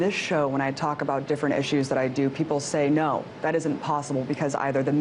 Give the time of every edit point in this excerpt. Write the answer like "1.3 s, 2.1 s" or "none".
2.4 s